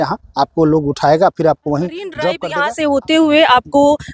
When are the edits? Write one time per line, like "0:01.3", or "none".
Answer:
0:02.4